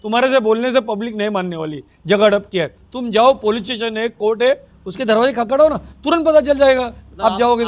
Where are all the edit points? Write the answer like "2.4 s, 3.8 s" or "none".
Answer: none